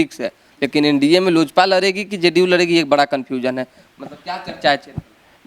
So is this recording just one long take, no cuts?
yes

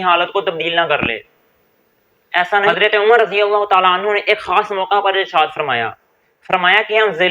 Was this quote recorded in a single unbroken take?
no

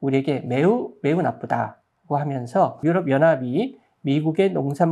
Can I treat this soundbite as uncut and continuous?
no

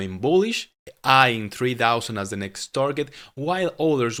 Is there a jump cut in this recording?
no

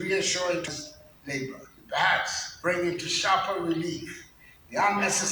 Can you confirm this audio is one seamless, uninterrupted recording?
no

